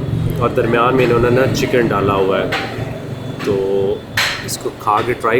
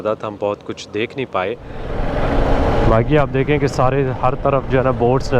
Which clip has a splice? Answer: second; 1 cut; at 1.9 s

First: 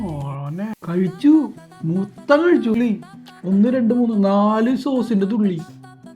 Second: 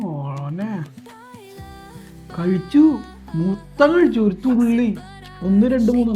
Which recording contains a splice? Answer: first; 2 cuts; at 0.7 s, 2.8 s

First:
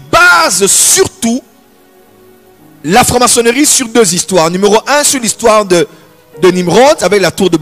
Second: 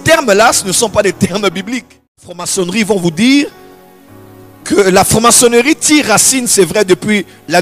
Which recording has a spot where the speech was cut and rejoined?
second; 1 cut; at 2.5 s

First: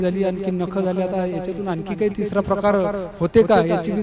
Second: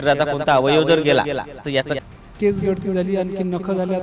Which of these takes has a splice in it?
second; 1 cut; at 1.9 s

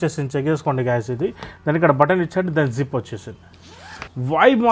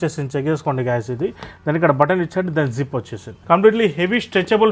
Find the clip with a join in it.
second; 1 cut; at 3.3 s

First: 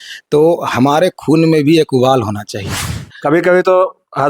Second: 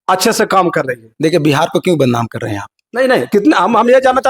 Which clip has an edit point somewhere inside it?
first; 1 cut; at 3.1 s

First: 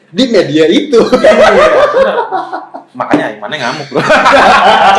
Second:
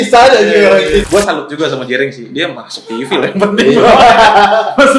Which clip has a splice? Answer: second; 1 cut; at 1.1 s

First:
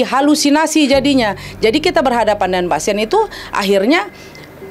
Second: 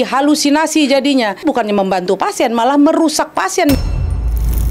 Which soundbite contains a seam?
second; 2 cuts; at 1.4 s, 3.8 s

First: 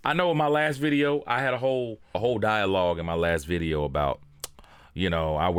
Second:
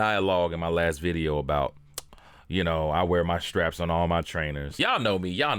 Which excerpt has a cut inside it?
second; 1 cut; at 4.7 s

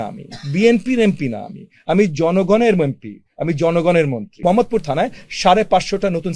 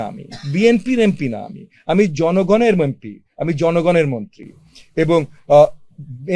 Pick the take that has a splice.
first; 1 cut; at 4.4 s

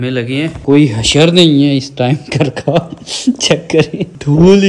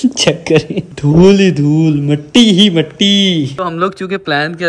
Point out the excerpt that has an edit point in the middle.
second; 1 cut; at 3.6 s

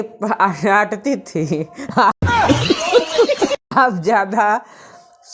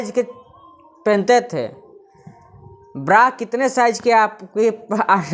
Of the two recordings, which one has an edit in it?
first; 2 cuts; at 2.1 s, 3.7 s

